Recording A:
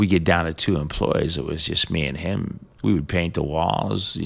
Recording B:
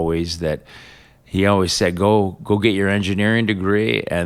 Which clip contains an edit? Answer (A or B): A